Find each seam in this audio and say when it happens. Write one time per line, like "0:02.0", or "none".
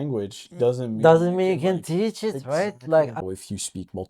0:03.2